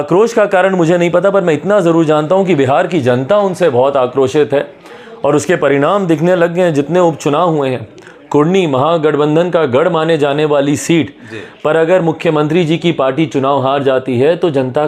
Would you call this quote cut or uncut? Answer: uncut